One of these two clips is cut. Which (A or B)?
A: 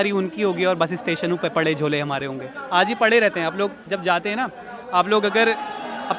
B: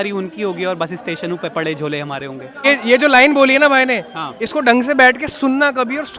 B